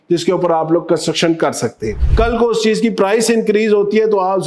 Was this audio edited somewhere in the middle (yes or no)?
yes